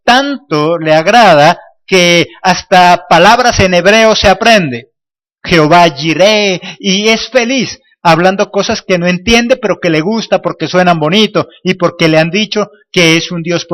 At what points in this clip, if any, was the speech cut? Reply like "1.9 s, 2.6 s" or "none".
11.0 s